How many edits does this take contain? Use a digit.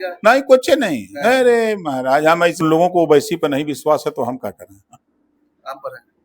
1